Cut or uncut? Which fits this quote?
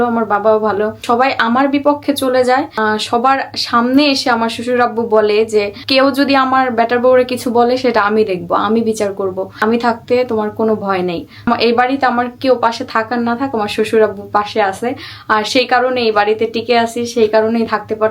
cut